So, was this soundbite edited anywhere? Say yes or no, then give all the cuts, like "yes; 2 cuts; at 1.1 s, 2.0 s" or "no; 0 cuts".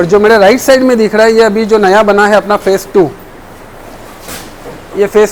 no; 0 cuts